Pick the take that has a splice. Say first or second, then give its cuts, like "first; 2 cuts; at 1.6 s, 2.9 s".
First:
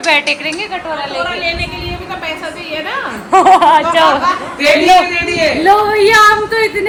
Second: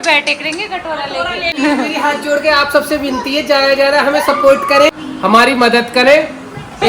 second; 2 cuts; at 1.6 s, 5.1 s